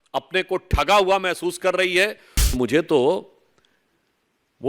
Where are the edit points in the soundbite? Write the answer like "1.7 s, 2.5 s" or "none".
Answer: 2.5 s